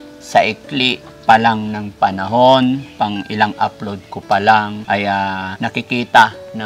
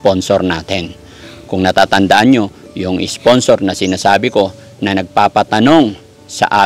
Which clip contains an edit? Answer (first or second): first